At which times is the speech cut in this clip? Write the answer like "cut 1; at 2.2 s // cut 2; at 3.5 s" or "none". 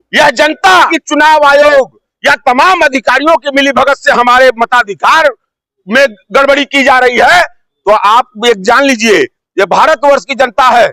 cut 1; at 1.0 s